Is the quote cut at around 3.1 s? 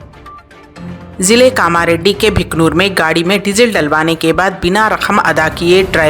no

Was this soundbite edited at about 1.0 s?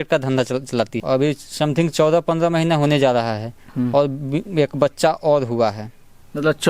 yes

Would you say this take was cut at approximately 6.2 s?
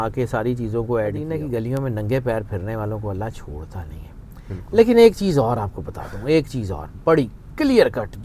no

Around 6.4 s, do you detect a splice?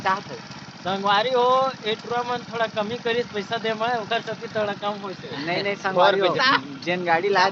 yes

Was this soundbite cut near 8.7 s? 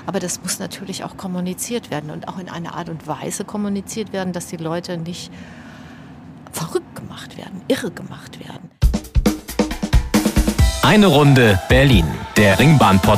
yes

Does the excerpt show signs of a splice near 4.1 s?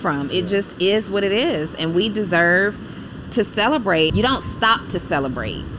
yes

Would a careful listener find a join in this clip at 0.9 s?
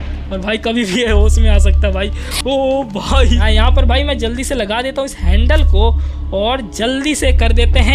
no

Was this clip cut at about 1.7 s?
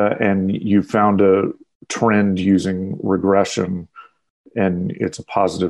no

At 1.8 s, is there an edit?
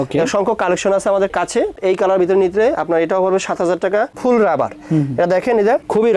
yes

